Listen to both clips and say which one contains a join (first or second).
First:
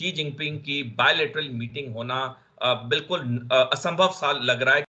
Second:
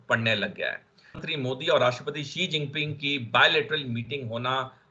second